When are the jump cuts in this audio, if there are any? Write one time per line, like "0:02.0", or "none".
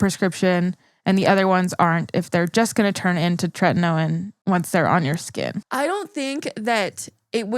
0:04.3
0:05.6